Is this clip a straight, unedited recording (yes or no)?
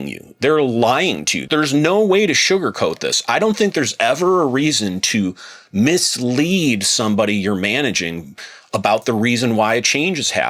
no